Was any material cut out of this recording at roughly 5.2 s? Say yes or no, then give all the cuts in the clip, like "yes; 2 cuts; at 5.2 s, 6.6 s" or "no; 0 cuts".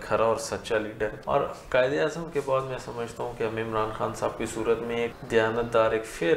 yes; 2 cuts; at 1.2 s, 5.2 s